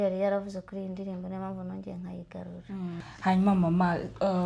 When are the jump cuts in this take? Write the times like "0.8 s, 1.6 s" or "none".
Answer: 3.0 s